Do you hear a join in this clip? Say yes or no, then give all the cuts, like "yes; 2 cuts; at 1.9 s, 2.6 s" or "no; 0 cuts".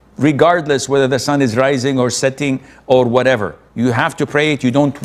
no; 0 cuts